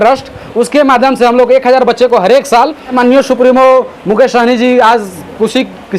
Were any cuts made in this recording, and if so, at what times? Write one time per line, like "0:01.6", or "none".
0:03.0